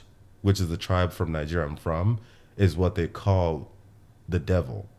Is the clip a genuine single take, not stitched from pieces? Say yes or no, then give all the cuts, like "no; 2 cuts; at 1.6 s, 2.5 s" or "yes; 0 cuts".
yes; 0 cuts